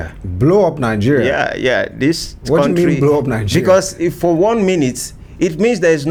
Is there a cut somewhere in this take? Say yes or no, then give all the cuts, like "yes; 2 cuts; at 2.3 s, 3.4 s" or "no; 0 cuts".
no; 0 cuts